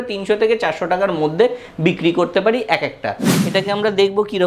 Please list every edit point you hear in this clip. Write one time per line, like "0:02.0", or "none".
0:03.4